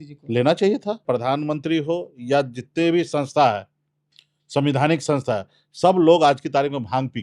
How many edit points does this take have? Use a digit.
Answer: 1